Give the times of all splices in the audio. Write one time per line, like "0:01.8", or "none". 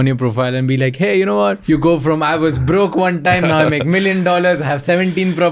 0:01.6